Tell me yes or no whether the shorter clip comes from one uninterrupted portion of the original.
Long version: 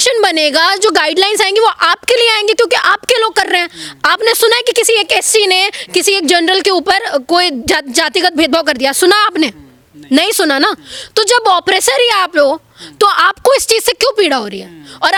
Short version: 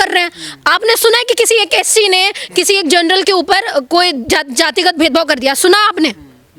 yes